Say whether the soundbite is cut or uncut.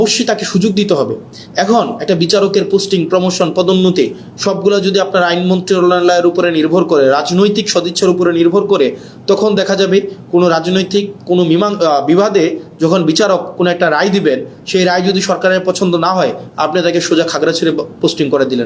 uncut